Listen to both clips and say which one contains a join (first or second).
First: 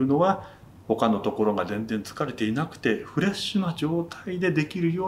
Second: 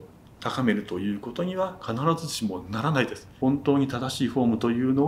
second